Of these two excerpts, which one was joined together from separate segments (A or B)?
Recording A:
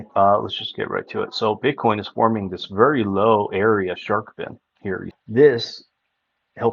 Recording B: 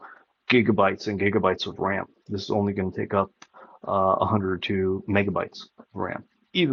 A